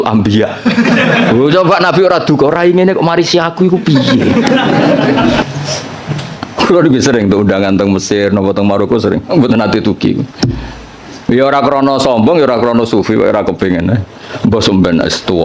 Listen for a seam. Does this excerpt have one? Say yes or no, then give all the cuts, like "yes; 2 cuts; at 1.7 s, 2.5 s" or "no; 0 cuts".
yes; 1 cut; at 5.4 s